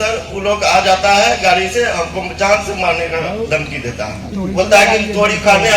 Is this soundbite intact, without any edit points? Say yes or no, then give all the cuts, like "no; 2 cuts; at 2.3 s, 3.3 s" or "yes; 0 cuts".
no; 1 cut; at 4.2 s